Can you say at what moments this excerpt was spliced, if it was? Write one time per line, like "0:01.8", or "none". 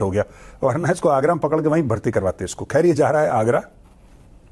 none